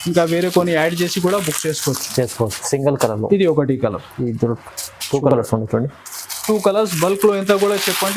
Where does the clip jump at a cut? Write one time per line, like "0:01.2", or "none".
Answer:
none